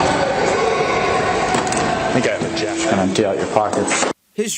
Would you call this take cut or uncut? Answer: uncut